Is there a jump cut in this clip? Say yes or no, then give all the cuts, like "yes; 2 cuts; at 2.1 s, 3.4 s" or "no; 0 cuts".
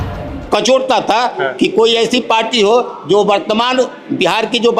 no; 0 cuts